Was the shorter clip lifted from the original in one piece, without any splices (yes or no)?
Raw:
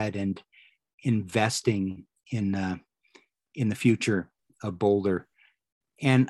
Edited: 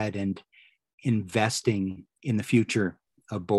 no